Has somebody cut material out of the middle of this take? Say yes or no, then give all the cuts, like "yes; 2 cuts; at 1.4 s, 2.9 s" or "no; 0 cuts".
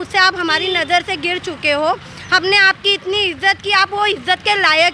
no; 0 cuts